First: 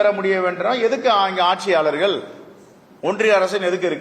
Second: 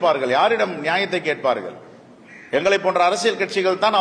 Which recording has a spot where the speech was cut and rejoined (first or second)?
first